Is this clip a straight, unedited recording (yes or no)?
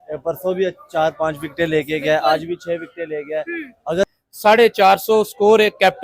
no